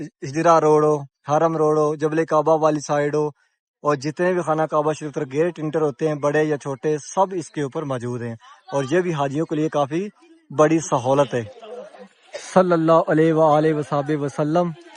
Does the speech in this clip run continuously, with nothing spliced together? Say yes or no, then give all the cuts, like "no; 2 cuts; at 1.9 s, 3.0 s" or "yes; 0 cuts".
yes; 0 cuts